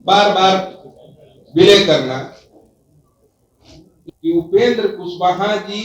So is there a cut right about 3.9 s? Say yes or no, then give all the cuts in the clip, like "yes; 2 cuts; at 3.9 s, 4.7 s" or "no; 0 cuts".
yes; 1 cut; at 3.9 s